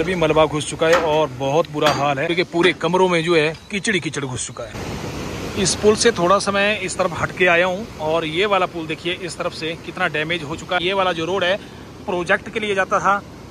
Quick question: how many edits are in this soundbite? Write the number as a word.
three